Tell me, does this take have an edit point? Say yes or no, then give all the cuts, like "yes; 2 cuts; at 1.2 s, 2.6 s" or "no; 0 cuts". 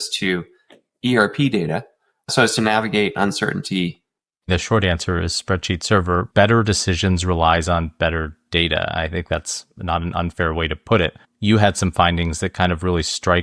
yes; 3 cuts; at 2.3 s, 4.5 s, 6.3 s